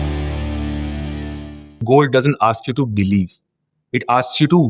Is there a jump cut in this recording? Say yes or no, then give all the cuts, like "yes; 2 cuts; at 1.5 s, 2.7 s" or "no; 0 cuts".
yes; 1 cut; at 1.8 s